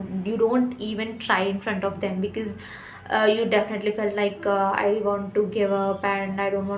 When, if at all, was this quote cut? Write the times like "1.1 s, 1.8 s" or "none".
none